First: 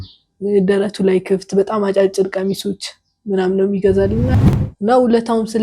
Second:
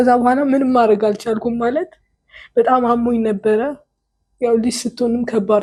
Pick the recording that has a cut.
first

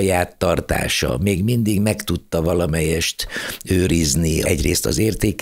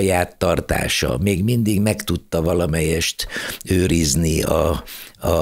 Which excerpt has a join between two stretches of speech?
first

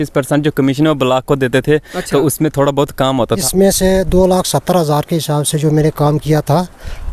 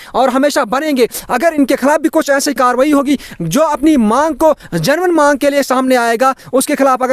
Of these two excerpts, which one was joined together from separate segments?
first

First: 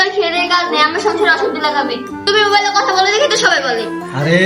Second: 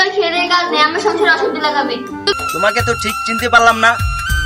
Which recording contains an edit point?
second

